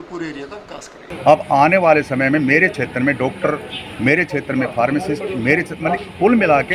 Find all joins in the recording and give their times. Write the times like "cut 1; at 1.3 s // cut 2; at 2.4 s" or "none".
cut 1; at 1.0 s